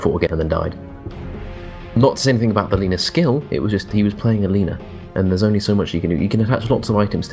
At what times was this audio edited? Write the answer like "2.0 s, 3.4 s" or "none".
2.5 s